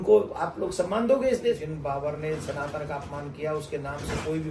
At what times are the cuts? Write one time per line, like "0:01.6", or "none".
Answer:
0:01.6

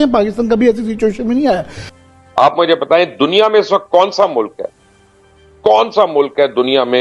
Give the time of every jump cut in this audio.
0:01.7

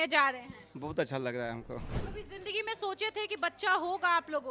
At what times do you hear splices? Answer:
0:02.0

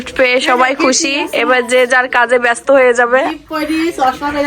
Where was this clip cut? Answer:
none

